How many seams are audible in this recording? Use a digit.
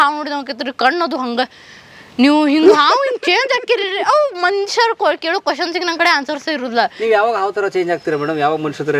0